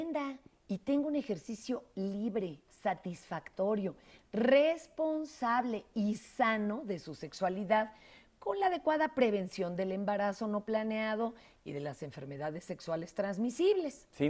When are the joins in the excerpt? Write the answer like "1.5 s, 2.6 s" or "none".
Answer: 10.9 s